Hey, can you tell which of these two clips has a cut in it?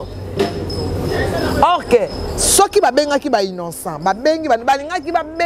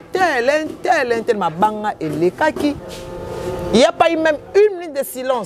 second; 1 cut; at 2.9 s

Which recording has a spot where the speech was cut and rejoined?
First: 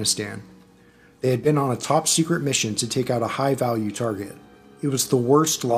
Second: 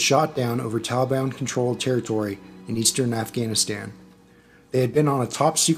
first; 1 cut; at 3.3 s

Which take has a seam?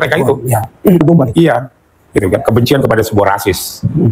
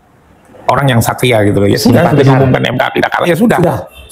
first; 1 cut; at 1.0 s

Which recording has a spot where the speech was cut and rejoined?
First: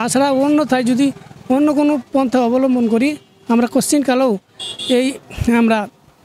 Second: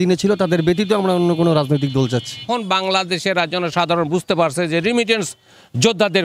second; 1 cut; at 2.4 s

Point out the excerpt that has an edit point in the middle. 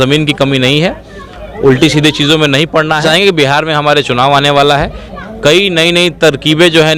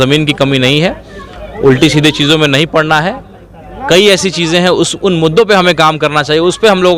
first; 1 cut; at 3.0 s

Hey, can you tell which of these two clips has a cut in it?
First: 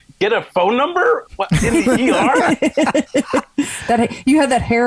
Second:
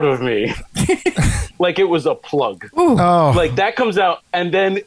second; 2 cuts; at 1.4 s, 2.6 s

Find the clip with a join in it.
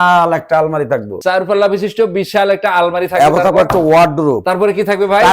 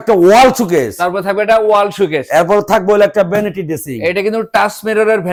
first; 2 cuts; at 1.1 s, 4.4 s

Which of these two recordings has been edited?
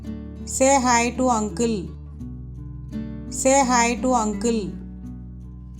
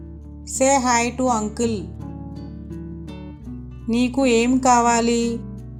first; 3 cuts; at 1.9 s, 3.2 s, 4.7 s

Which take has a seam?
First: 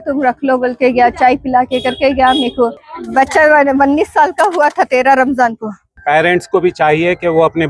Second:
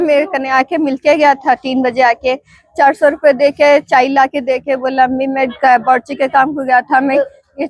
first; 2 cuts; at 2.9 s, 5.9 s

